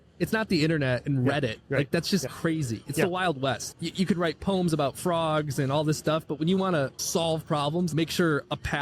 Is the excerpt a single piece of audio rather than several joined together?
no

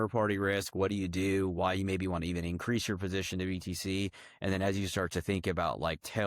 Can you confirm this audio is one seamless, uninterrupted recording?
yes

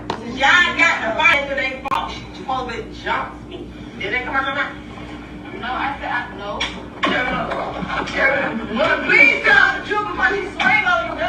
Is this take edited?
no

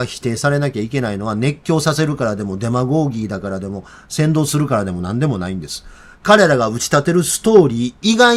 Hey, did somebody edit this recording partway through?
no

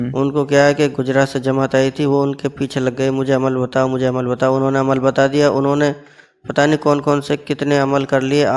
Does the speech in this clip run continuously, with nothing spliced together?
yes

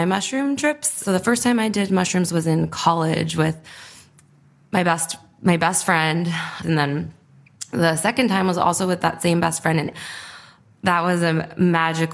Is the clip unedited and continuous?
no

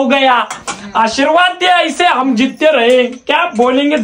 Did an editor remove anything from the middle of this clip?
no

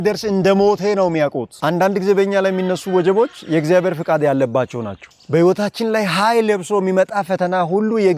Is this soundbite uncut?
no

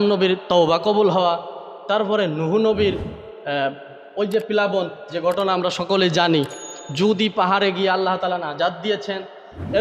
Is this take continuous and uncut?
yes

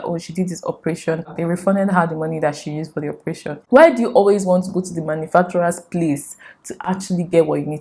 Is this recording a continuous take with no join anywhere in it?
no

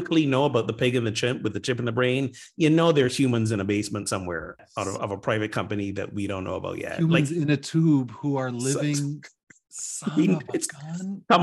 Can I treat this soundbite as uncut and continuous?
yes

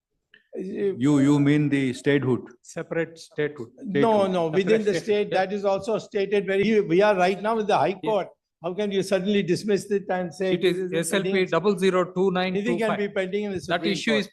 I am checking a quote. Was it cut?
yes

